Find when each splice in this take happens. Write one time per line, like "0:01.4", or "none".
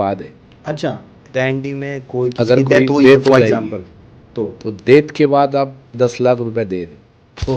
none